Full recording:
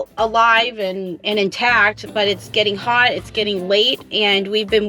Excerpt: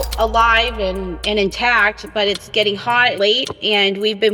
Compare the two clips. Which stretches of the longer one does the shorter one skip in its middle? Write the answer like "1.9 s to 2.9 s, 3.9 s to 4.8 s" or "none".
3.1 s to 3.7 s